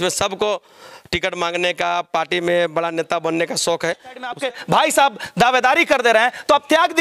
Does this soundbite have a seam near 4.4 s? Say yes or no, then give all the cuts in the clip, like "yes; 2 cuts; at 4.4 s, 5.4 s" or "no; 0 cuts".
yes; 1 cut; at 4.4 s